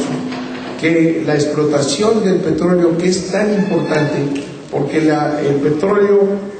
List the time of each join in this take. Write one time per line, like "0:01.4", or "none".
0:04.9